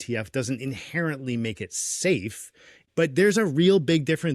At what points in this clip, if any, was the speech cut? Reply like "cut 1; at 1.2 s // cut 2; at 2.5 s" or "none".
cut 1; at 2.6 s